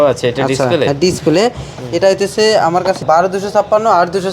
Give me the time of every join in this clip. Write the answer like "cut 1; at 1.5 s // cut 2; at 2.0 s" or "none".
cut 1; at 3.0 s

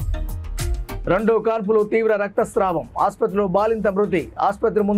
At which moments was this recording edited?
cut 1; at 1.0 s

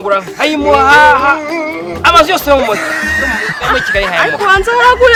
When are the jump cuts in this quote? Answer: none

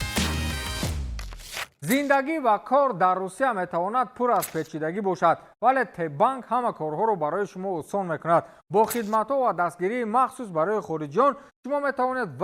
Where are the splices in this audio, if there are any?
cut 1; at 1.6 s

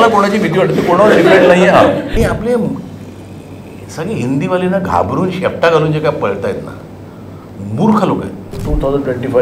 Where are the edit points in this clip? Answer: cut 1; at 2.1 s // cut 2; at 8.6 s

